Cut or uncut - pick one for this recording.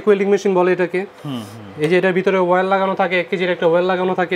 uncut